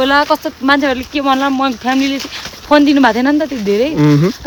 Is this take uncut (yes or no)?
yes